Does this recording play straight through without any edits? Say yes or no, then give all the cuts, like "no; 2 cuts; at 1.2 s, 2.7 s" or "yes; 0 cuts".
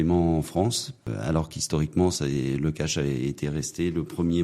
no; 1 cut; at 1.1 s